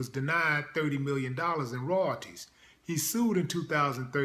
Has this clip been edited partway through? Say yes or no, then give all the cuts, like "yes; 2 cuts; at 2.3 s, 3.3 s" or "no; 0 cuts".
yes; 1 cut; at 3.2 s